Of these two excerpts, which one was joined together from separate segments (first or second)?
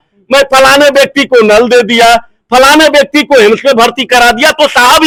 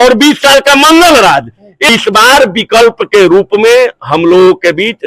second